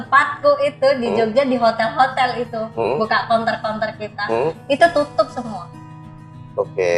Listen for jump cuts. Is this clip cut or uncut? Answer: uncut